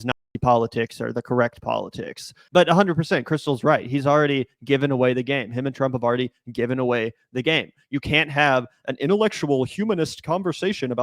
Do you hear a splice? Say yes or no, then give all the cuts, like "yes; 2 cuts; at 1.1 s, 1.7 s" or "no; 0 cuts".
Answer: yes; 1 cut; at 2.3 s